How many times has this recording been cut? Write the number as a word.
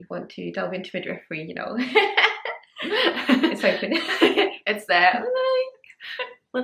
zero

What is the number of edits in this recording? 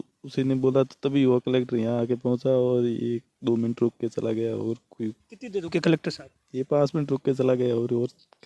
zero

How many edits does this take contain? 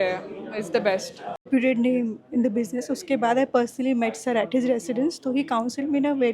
one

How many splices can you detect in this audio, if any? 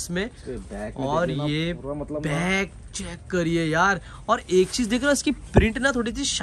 zero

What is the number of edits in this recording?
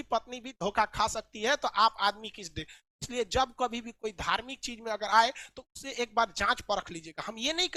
zero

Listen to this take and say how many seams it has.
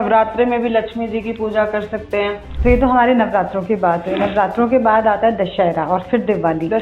one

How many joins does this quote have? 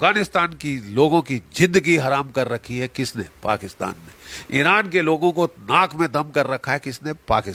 zero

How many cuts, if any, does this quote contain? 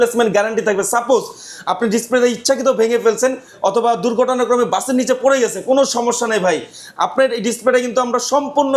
zero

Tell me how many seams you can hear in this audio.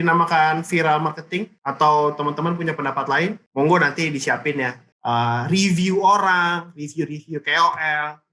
one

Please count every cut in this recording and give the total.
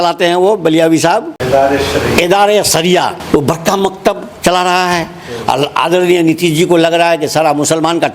two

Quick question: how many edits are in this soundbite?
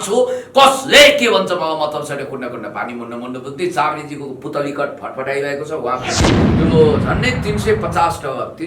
one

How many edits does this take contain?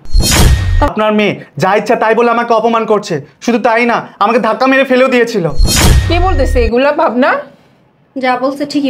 one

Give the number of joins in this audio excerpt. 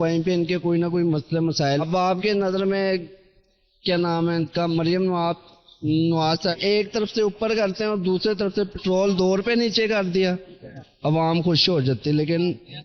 two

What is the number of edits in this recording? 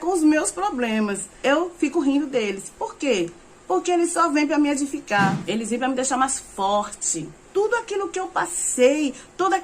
three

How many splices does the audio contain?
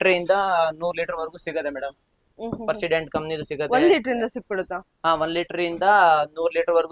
zero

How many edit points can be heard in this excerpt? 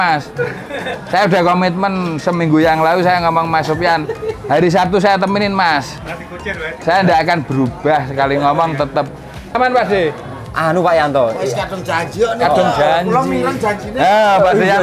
one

